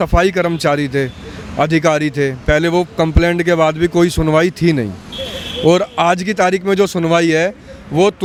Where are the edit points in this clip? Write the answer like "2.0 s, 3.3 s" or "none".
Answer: none